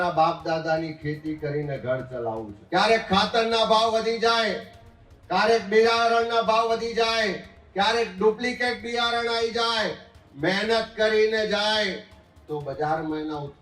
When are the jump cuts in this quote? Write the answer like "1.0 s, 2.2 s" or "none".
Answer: 2.5 s